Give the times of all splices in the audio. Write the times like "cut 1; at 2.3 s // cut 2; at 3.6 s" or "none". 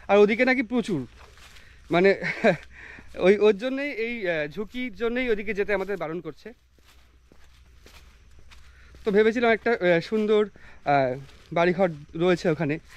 none